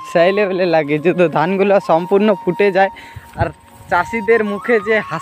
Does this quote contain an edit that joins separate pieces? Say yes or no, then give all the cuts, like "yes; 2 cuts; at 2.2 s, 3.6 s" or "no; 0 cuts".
no; 0 cuts